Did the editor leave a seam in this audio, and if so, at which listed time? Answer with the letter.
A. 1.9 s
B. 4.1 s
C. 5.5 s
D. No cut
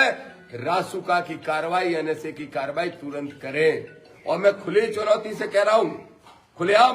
B